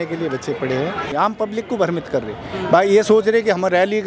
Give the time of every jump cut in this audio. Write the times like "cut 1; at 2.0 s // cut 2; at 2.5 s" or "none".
cut 1; at 1.1 s